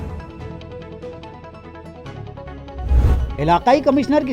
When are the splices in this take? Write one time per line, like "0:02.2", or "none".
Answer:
0:03.3